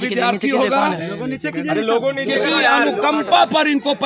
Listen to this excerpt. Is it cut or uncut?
uncut